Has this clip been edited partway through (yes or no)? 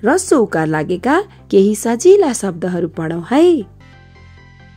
yes